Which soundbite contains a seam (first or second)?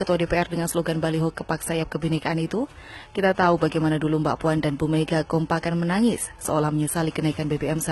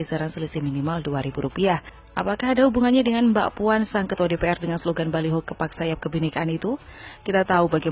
second